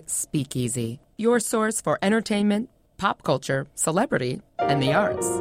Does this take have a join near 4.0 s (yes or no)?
no